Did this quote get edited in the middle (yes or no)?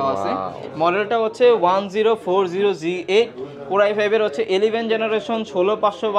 no